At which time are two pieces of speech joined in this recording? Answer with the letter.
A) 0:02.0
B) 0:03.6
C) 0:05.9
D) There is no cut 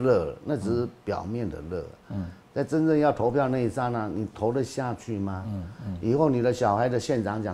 D